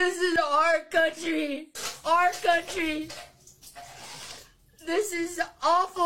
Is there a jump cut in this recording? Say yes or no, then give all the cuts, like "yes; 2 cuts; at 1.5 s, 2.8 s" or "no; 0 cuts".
yes; 1 cut; at 5.1 s